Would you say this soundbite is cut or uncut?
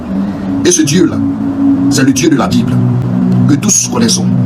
uncut